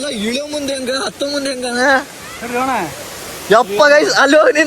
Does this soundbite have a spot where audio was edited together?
no; 0 cuts

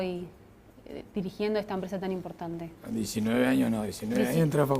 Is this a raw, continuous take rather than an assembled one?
no; 1 cut; at 1.3 s

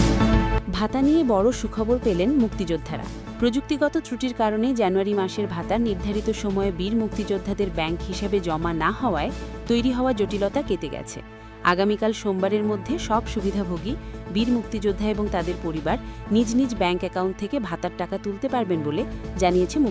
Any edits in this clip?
no; 0 cuts

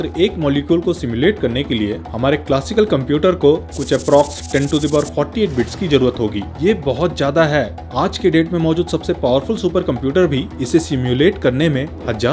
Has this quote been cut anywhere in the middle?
no; 0 cuts

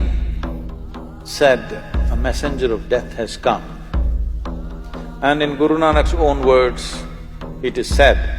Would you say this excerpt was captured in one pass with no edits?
yes; 0 cuts

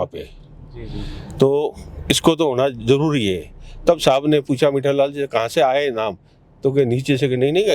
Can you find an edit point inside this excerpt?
no; 0 cuts

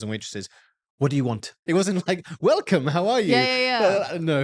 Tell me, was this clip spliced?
yes; 1 cut; at 1.5 s

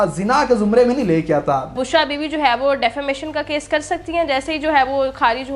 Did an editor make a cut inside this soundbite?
yes; 1 cut; at 1.8 s

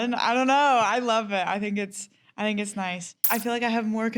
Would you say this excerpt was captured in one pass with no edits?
no; 1 cut; at 3.3 s

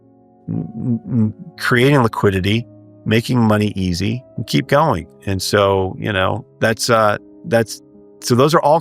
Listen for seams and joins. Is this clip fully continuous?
no; 2 cuts; at 4.3 s, 6.5 s

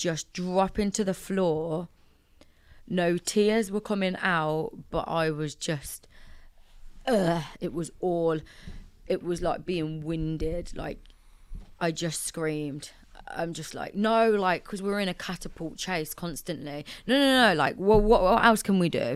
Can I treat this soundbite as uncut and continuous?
yes; 0 cuts

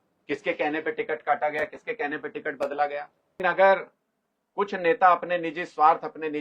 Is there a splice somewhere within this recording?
yes; 1 cut; at 3.4 s

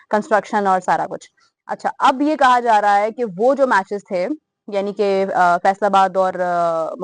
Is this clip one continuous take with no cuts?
yes; 0 cuts

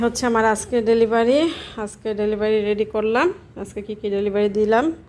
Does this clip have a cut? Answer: no; 0 cuts

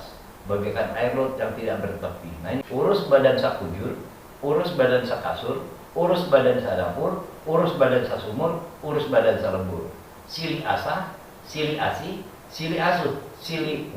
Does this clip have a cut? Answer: yes; 1 cut; at 2.6 s

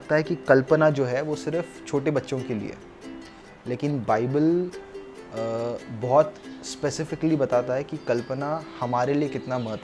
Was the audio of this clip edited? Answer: no; 0 cuts

